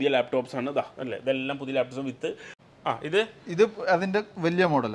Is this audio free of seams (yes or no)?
no